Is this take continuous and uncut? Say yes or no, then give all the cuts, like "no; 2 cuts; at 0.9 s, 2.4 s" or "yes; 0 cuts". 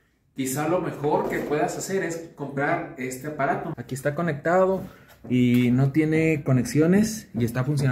no; 1 cut; at 3.7 s